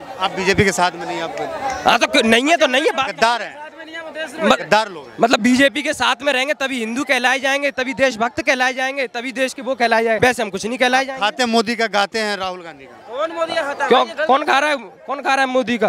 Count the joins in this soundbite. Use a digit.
1